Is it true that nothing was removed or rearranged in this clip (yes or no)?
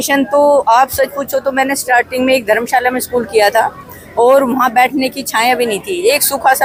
yes